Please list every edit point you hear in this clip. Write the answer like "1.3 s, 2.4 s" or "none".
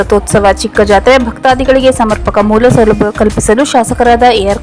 none